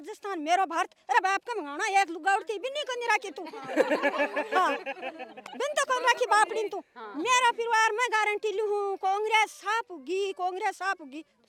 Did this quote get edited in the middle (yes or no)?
no